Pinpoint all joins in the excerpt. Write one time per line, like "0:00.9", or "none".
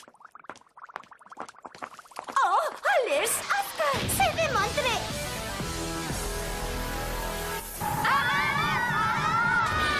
0:05.8